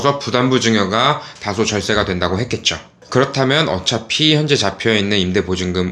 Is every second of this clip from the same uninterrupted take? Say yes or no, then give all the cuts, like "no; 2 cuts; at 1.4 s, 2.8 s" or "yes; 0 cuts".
yes; 0 cuts